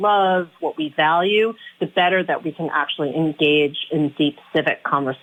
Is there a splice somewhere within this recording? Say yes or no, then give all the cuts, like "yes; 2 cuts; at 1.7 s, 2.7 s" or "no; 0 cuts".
no; 0 cuts